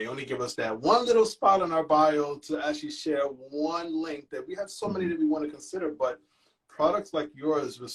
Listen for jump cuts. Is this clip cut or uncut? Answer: uncut